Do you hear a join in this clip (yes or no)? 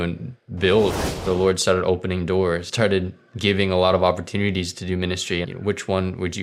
yes